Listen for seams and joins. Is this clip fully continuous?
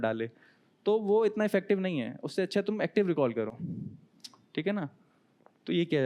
yes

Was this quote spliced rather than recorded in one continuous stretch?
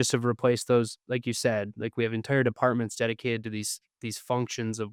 no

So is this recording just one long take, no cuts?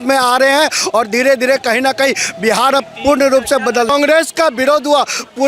no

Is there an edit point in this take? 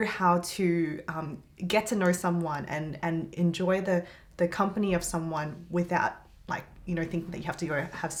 no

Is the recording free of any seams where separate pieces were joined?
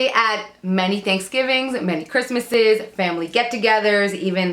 yes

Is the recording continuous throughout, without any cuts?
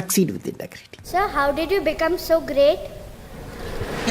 no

